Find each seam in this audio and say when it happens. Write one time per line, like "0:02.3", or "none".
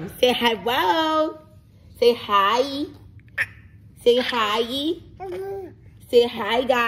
none